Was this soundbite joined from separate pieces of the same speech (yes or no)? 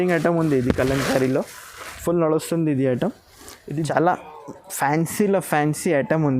yes